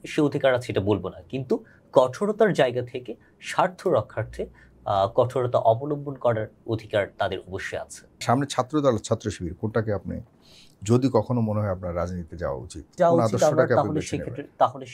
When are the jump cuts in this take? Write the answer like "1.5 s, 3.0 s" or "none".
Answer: 8.2 s, 12.9 s